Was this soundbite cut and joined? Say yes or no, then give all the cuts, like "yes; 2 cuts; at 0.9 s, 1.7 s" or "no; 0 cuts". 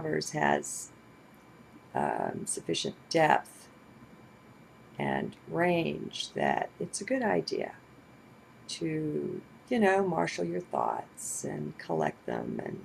no; 0 cuts